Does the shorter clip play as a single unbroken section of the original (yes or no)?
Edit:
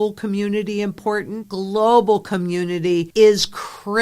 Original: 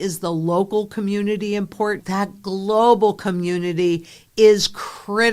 no